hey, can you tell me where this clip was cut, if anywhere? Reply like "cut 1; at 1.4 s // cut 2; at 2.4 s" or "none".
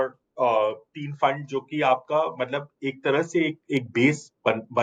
none